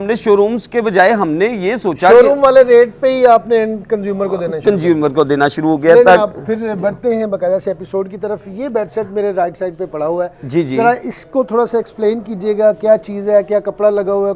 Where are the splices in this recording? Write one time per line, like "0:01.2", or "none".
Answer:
none